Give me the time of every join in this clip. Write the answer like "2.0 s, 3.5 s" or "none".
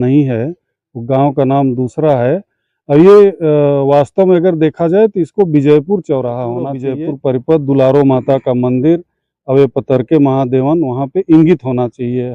6.9 s